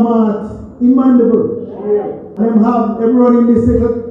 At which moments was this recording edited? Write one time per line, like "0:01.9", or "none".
0:02.2